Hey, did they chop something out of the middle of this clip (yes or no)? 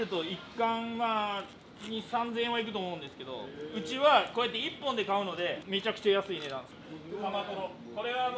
yes